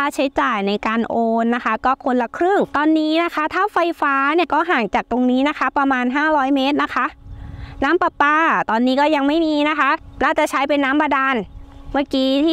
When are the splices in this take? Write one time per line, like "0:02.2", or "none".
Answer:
0:02.7
0:04.5
0:10.1